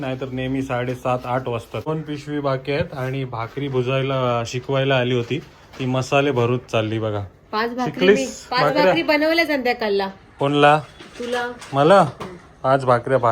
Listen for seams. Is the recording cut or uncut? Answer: cut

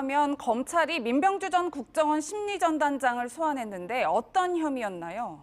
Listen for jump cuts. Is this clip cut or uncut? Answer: cut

